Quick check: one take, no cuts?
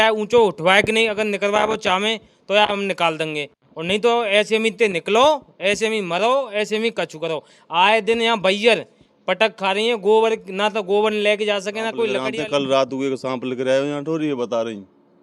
no; 1 cut; at 12.2 s

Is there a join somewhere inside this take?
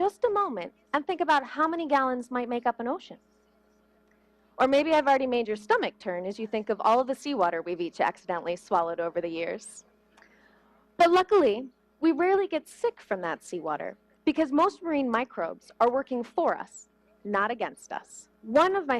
no; 0 cuts

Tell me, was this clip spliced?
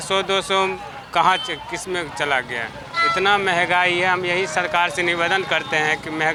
no; 0 cuts

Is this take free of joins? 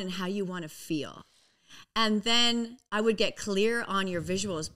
yes; 0 cuts

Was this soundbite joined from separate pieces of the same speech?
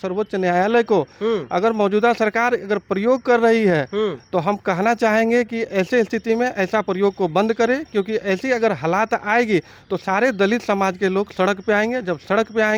no; 0 cuts

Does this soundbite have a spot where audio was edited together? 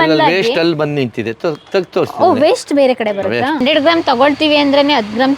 yes; 1 cut; at 3.6 s

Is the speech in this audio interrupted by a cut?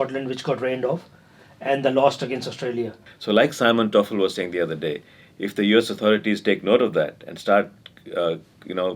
yes; 1 cut; at 3.1 s

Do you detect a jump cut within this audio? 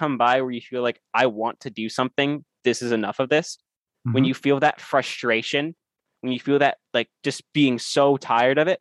no; 0 cuts

